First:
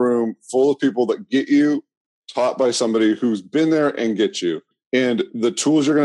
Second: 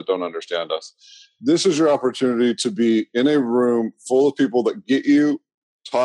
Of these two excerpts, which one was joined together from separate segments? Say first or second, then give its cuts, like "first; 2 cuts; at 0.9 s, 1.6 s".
first; 1 cut; at 4.7 s